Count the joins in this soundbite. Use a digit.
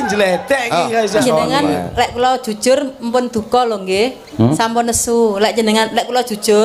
1